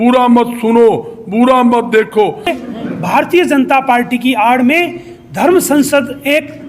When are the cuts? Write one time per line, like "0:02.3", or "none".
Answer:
0:02.5

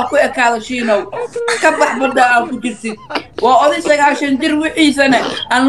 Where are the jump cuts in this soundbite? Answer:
none

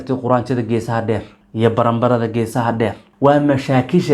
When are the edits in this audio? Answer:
0:01.4
0:03.0

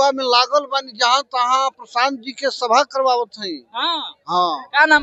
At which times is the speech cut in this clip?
none

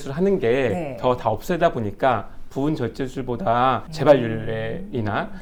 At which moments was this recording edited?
none

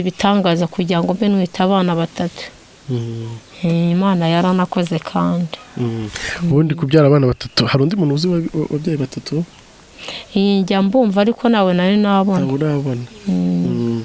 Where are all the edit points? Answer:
none

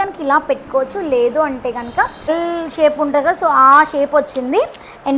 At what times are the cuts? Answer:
0:02.3

